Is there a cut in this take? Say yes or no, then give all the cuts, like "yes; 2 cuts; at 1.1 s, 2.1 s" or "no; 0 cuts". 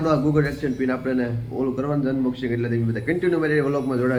no; 0 cuts